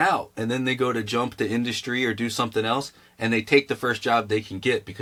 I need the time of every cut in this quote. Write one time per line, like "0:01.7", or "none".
none